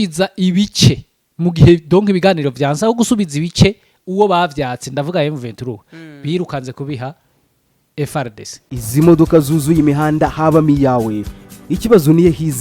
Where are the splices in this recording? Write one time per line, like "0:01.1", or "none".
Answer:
0:08.6